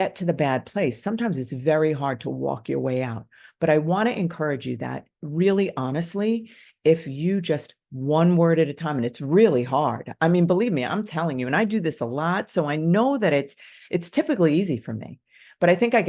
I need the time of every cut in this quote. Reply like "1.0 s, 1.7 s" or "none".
none

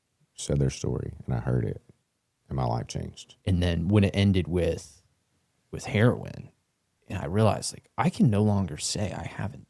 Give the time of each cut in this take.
3.2 s

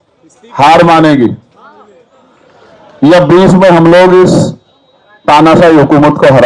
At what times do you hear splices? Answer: none

